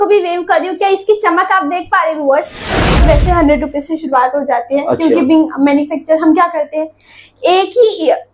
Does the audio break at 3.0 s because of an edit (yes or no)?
yes